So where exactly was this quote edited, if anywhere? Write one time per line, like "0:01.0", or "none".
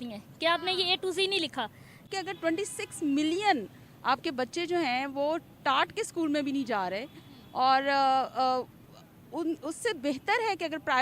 0:02.1